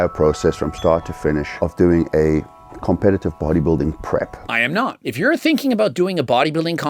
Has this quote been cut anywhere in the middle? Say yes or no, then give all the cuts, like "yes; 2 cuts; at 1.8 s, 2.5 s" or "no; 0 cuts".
yes; 1 cut; at 5.0 s